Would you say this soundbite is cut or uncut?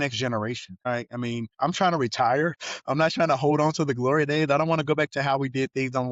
uncut